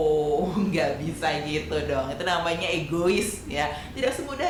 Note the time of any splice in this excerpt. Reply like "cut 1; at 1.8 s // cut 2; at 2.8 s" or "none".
none